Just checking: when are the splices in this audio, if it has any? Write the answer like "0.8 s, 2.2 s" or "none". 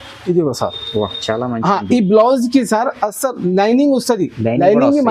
none